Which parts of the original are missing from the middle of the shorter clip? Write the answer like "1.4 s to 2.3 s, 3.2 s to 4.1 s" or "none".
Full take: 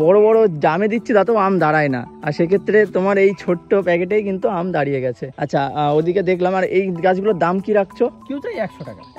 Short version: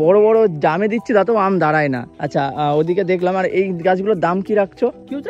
2.1 s to 5.3 s